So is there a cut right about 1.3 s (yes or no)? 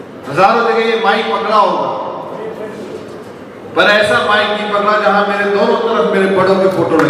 no